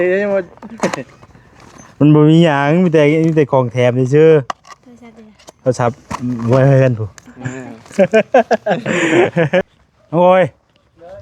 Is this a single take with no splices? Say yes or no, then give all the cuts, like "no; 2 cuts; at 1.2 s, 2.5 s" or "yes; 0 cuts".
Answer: no; 1 cut; at 9.6 s